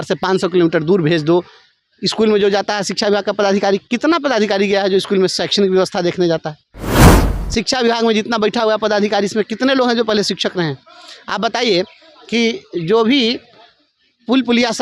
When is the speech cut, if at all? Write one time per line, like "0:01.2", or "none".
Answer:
none